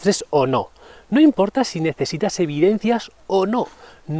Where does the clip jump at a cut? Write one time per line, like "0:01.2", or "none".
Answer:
none